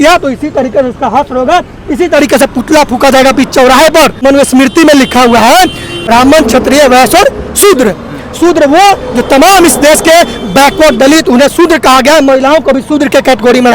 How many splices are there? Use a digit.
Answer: 2